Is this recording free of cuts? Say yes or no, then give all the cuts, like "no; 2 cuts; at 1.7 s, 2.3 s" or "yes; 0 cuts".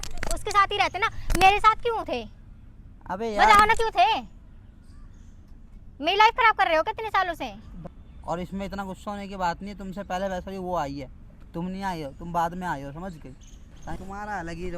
no; 2 cuts; at 8.2 s, 13.5 s